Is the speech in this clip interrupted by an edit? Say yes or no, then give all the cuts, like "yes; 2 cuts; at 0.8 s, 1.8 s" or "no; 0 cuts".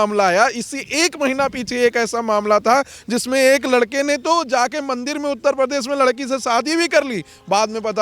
no; 0 cuts